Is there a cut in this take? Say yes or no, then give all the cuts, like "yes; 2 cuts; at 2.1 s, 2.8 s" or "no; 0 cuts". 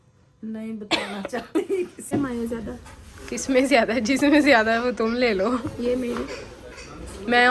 yes; 1 cut; at 2.1 s